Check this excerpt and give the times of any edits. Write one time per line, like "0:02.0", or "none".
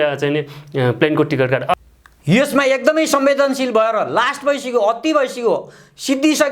0:01.7